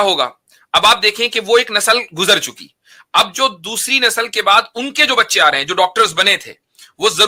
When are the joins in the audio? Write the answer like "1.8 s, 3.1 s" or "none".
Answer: none